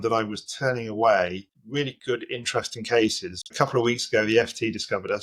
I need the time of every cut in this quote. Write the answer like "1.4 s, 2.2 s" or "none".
3.4 s